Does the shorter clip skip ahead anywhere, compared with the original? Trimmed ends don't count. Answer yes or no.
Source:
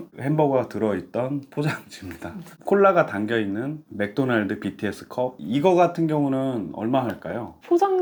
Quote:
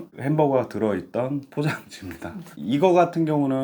yes